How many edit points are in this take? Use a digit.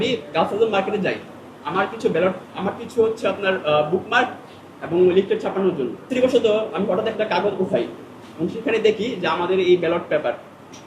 1